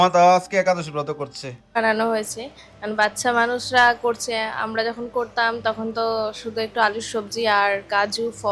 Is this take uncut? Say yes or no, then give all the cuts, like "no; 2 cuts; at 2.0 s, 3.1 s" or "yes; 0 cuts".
no; 1 cut; at 1.8 s